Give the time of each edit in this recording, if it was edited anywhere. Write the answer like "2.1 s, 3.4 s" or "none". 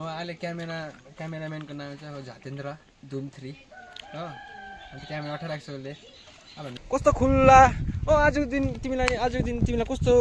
6.8 s

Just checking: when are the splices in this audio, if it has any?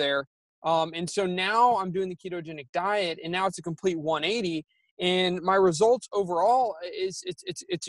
none

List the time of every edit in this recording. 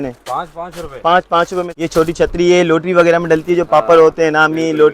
1.7 s

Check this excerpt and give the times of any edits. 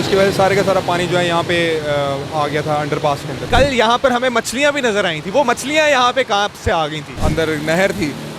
3.5 s, 7.2 s

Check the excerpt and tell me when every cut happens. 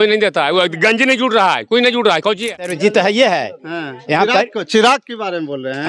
2.7 s

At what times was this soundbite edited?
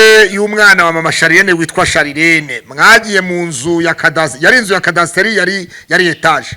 none

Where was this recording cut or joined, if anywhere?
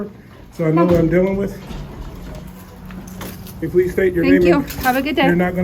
3.6 s

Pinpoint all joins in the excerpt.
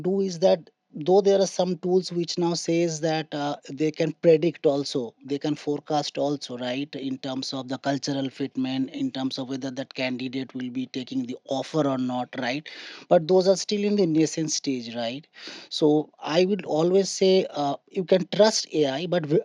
none

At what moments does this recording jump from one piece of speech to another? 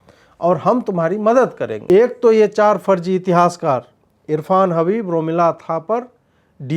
1.8 s

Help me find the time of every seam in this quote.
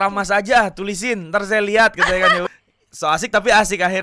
2.5 s

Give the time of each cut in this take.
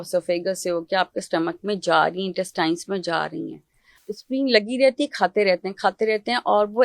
3.9 s

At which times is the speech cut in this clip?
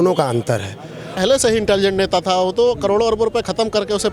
1.2 s

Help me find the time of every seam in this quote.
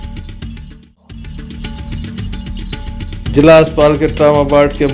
1.1 s

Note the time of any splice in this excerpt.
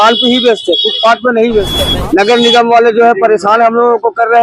1.8 s

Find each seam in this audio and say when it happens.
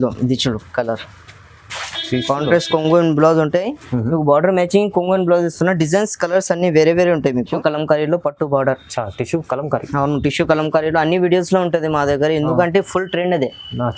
7.5 s

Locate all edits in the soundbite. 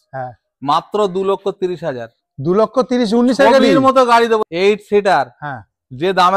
4.4 s

